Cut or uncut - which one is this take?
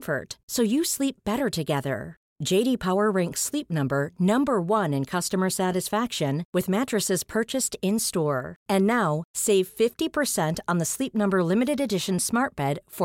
uncut